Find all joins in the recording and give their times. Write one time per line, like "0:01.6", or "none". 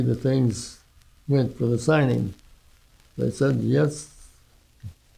none